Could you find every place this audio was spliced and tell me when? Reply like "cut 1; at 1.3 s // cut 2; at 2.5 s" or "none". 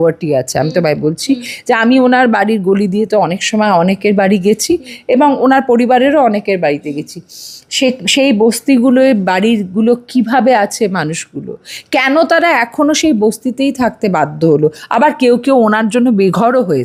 none